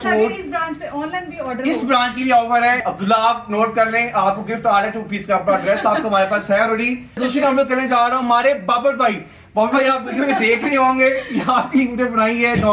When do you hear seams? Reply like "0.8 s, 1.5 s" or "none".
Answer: 2.8 s, 7.2 s